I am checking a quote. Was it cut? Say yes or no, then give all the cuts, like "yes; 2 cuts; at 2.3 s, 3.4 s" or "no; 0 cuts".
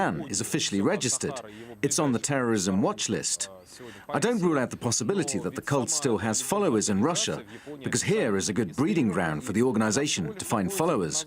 yes; 1 cut; at 5.6 s